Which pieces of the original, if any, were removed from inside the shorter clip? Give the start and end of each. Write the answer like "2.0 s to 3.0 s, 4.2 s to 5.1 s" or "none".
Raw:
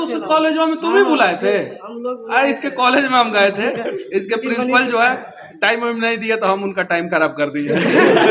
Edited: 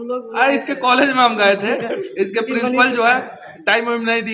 none